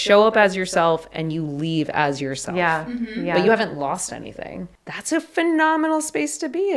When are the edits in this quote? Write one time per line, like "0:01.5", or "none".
0:04.8